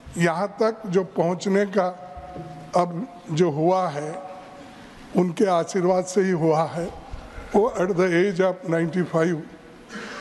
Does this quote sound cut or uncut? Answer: uncut